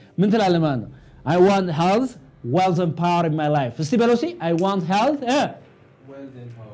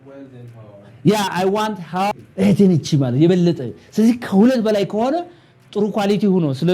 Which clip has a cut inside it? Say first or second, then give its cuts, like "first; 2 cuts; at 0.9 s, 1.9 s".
second; 1 cut; at 2.1 s